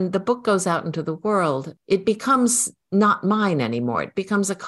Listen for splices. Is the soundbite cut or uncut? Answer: cut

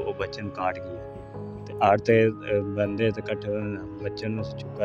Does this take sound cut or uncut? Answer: uncut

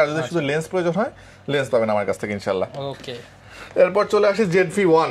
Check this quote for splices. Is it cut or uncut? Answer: uncut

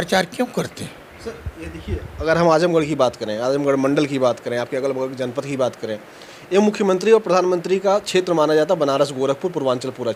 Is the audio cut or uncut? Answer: uncut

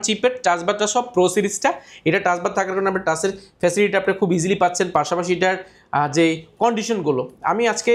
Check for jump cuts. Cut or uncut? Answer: uncut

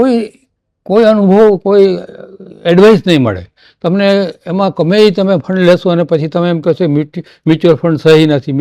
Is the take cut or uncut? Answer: uncut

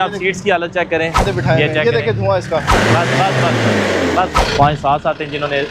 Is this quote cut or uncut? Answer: cut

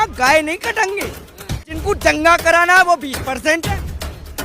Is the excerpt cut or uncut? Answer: cut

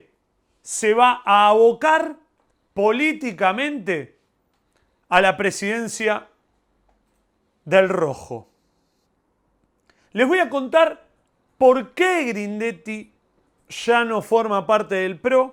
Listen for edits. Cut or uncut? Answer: uncut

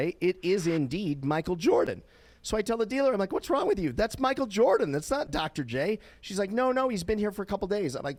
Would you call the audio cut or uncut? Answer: uncut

